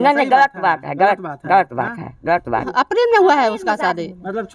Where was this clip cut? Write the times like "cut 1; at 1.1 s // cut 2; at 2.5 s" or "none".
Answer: cut 1; at 2.7 s